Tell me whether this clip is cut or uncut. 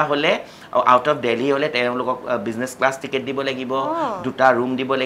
uncut